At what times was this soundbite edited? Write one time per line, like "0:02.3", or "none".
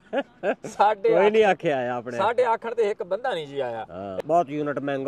0:04.1